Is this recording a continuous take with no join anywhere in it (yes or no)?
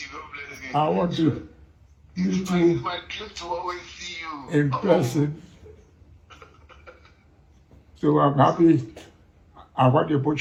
yes